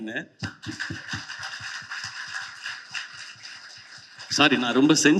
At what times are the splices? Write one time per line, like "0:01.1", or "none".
none